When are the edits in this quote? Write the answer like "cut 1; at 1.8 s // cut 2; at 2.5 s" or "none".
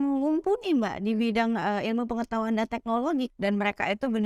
cut 1; at 3.3 s